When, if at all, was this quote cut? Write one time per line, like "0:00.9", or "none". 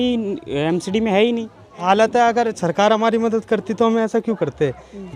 0:01.8